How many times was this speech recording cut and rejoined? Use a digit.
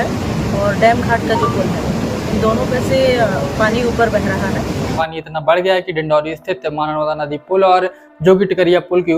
1